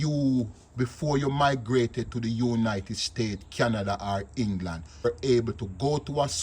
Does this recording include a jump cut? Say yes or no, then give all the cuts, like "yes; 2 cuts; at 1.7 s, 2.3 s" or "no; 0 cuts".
yes; 1 cut; at 5.1 s